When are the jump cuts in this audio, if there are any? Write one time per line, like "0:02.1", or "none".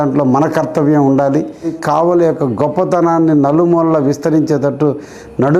0:01.8